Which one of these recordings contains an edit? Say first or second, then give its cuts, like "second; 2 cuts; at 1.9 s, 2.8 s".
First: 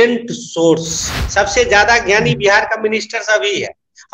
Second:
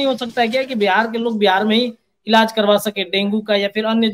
first; 1 cut; at 1.1 s